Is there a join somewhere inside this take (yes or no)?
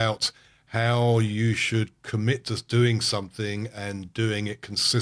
no